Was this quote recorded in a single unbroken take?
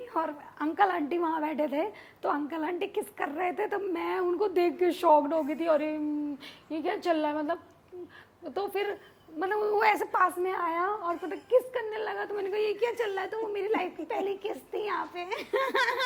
yes; 0 cuts

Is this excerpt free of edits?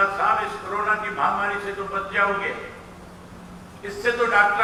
yes; 0 cuts

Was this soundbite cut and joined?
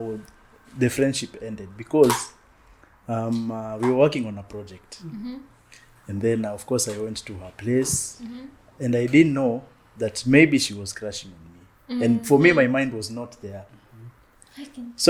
no; 0 cuts

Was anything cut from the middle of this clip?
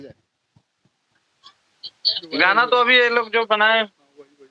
no; 0 cuts

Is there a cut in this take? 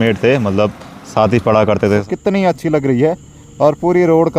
yes; 1 cut; at 2.0 s

